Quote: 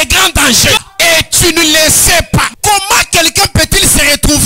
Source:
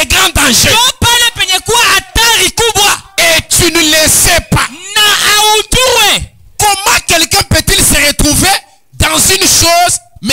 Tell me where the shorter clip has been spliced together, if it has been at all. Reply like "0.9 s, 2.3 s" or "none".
0.8 s, 2.5 s